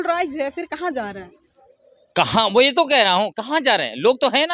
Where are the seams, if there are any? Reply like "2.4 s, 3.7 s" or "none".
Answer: none